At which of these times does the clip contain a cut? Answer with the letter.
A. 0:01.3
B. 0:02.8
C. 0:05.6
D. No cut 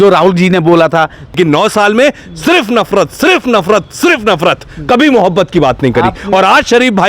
A